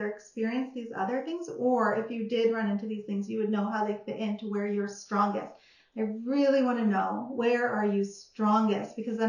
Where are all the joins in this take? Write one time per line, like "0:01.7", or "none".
none